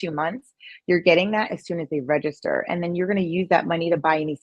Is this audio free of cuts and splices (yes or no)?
yes